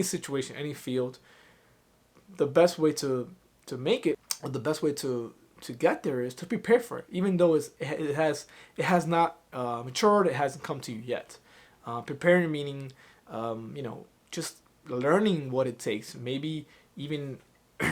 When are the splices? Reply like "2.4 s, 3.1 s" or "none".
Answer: 4.3 s